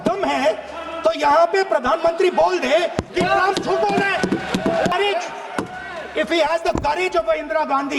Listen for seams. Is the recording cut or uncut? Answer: cut